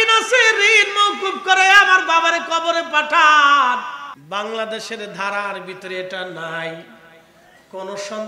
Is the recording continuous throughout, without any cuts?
no; 1 cut; at 4.1 s

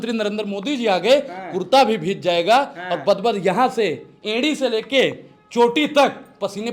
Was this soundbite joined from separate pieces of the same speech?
no; 0 cuts

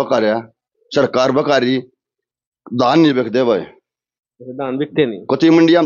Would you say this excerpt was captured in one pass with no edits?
yes; 0 cuts

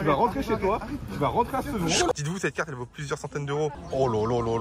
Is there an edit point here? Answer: yes; 2 cuts; at 2.1 s, 3.8 s

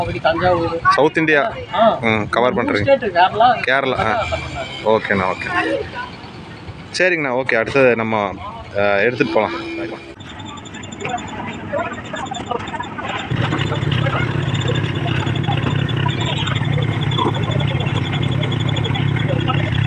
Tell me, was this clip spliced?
no; 0 cuts

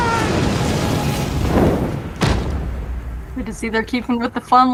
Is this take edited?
no; 0 cuts

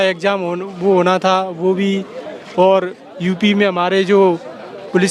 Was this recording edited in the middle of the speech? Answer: no; 0 cuts

